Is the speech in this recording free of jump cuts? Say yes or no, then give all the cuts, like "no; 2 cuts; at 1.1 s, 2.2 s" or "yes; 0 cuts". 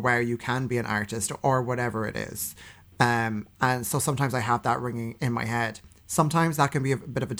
yes; 0 cuts